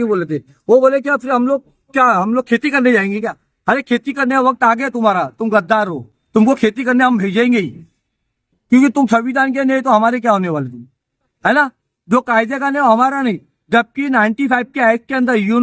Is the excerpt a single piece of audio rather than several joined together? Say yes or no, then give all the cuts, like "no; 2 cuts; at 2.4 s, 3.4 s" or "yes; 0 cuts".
yes; 0 cuts